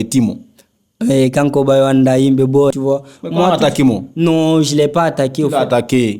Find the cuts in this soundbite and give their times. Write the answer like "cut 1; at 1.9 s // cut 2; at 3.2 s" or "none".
cut 1; at 2.7 s

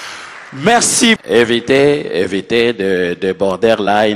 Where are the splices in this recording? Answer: cut 1; at 1.2 s

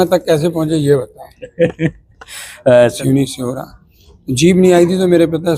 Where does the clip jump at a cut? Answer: cut 1; at 3.0 s

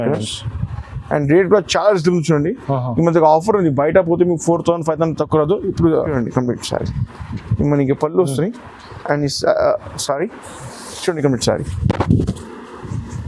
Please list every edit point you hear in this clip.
cut 1; at 6.1 s

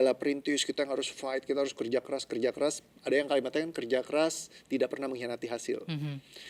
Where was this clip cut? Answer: none

